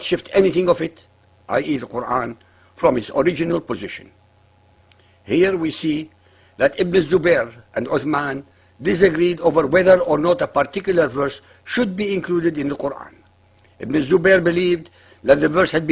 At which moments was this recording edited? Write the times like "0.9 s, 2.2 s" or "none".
11.8 s

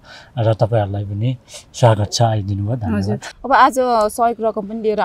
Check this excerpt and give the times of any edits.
3.3 s

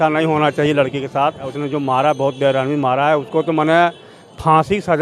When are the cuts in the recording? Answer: 1.5 s

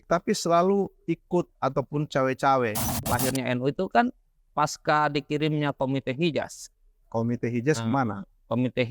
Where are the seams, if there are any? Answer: 2.9 s

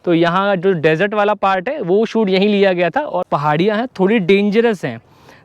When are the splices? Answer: 3.2 s

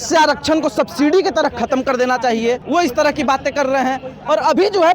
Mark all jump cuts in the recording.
2.6 s

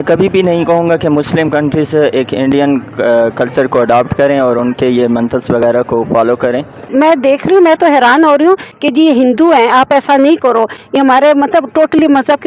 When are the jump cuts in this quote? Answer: 6.7 s, 8.7 s

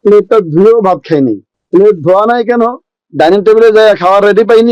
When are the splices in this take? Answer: 1.5 s

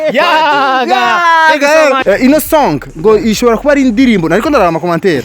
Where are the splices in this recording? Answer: 2.0 s

